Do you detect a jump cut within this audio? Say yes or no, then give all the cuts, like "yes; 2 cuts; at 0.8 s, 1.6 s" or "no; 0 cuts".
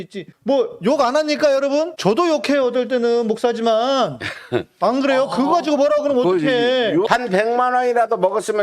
yes; 1 cut; at 7.1 s